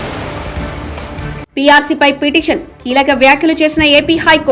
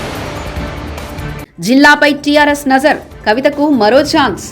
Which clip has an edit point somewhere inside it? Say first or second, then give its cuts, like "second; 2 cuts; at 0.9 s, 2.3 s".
first; 1 cut; at 1.4 s